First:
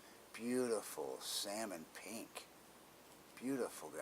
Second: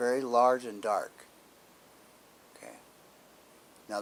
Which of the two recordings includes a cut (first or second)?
first